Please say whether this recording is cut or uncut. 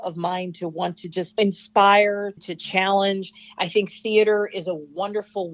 uncut